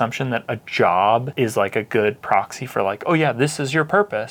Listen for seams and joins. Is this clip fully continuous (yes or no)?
yes